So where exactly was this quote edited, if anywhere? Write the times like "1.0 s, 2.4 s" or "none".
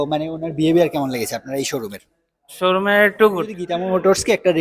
3.6 s